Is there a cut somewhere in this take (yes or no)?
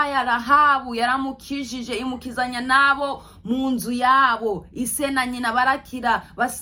no